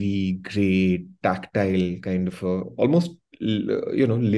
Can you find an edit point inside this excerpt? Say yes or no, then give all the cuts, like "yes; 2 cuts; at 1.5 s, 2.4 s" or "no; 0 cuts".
no; 0 cuts